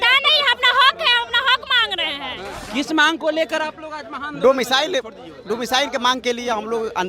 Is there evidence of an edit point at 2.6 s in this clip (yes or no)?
yes